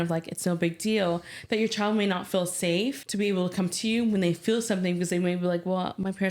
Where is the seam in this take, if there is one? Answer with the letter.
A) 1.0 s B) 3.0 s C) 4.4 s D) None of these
B